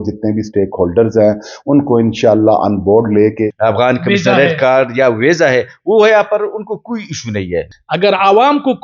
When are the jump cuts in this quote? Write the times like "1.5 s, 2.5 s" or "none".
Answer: 3.5 s, 7.7 s